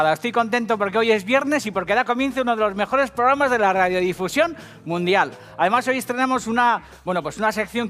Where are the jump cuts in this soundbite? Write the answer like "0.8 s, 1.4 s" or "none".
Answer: 6.4 s